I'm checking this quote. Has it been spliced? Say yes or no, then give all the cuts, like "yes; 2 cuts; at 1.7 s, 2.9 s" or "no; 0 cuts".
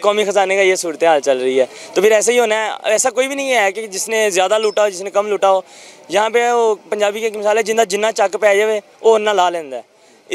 no; 0 cuts